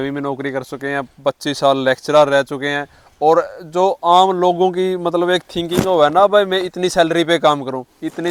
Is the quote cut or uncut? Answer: uncut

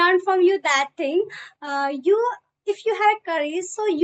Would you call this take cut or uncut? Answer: uncut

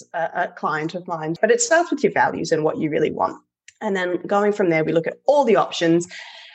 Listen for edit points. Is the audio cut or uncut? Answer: cut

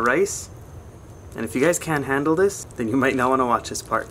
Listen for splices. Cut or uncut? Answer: cut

